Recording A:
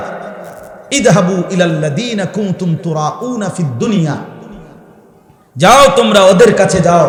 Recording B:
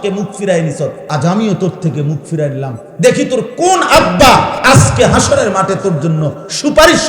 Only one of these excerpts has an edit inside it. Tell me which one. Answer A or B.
B